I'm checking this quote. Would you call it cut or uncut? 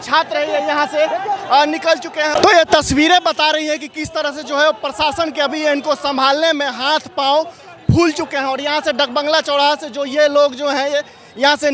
uncut